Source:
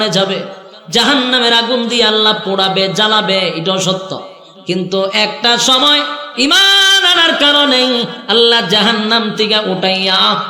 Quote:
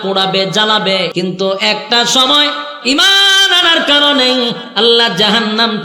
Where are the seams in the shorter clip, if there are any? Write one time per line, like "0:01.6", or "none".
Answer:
0:01.1